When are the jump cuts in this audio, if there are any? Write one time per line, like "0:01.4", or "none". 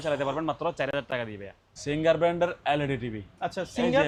none